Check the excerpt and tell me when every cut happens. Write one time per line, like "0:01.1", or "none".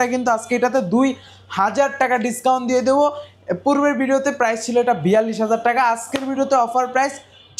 none

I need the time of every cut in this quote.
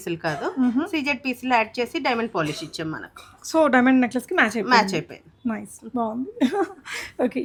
none

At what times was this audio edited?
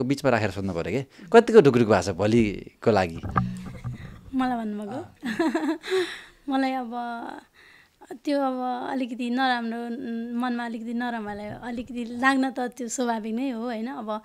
none

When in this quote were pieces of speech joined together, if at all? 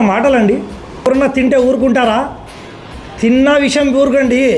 0:01.1

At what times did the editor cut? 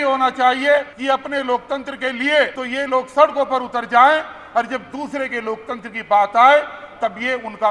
0:00.9
0:02.6

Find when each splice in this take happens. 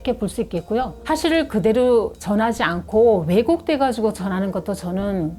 0:01.0

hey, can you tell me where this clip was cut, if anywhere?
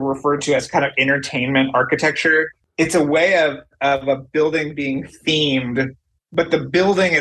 0:02.6

